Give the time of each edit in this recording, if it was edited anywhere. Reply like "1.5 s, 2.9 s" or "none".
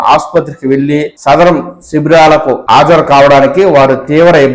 1.1 s, 2.6 s